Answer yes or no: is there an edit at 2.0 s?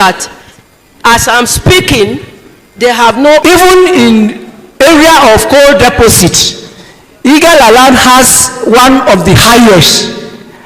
no